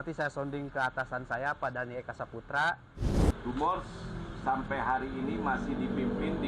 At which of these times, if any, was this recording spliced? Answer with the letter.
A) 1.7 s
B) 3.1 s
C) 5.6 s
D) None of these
B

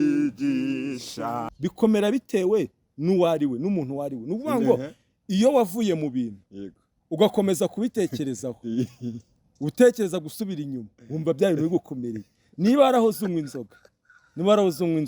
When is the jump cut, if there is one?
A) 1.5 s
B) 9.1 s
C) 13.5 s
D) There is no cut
A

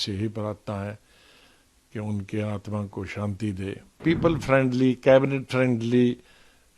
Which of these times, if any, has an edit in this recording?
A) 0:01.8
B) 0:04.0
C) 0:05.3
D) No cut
B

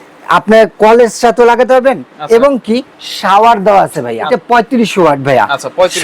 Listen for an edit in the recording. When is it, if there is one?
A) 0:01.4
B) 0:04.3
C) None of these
B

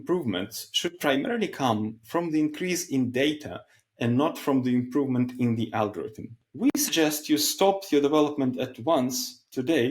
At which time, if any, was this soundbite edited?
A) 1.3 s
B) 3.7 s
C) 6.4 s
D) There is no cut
C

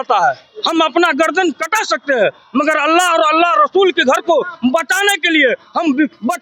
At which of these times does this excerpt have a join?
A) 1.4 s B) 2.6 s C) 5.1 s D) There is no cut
D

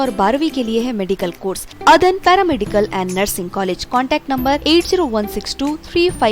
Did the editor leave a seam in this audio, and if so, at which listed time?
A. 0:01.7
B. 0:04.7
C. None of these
A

